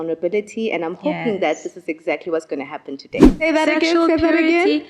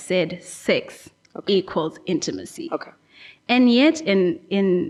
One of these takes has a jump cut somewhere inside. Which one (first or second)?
first